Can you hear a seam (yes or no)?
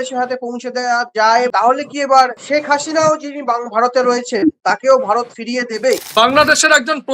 yes